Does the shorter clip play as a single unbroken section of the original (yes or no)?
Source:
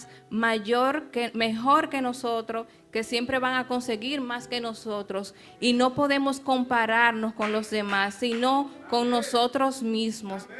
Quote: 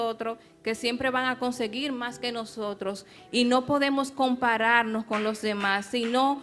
yes